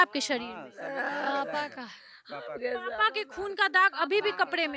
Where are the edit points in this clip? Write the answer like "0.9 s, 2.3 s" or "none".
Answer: none